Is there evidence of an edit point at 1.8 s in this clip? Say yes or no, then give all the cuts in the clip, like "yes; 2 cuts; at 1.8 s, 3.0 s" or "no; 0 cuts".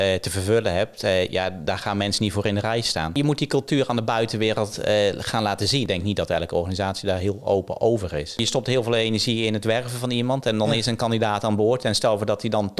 no; 3 cuts; at 3.2 s, 5.9 s, 8.4 s